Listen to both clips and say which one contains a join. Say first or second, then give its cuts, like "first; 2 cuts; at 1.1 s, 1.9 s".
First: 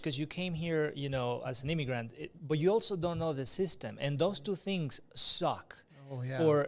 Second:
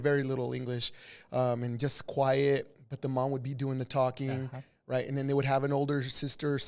first; 1 cut; at 2.0 s